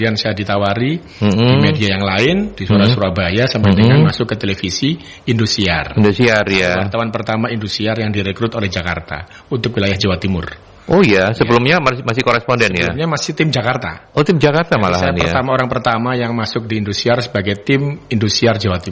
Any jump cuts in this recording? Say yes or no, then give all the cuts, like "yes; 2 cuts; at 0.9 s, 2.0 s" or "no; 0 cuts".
no; 0 cuts